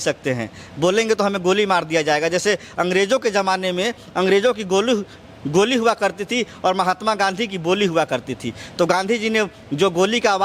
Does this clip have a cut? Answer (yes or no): no